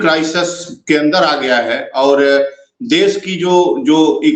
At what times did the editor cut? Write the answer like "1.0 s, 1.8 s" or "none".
none